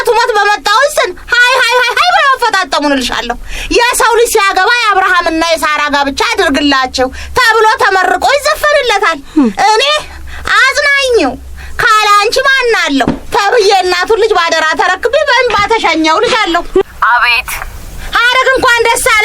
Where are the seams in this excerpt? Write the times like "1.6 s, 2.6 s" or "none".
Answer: 16.8 s